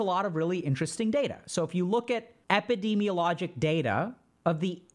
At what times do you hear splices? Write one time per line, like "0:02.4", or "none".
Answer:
0:02.3